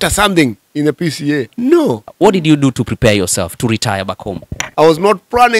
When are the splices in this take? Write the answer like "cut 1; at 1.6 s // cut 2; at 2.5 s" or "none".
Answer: cut 1; at 1.8 s // cut 2; at 4.6 s